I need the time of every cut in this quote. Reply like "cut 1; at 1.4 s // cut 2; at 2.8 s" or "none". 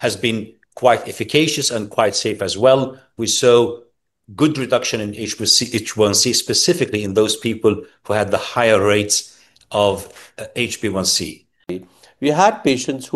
cut 1; at 11.8 s